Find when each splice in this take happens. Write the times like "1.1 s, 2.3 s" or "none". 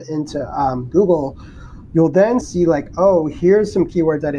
2.4 s